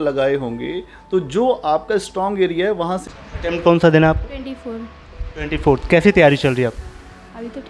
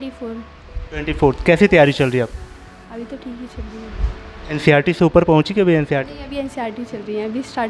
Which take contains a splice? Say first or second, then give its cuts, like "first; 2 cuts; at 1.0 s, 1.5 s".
first; 1 cut; at 3.0 s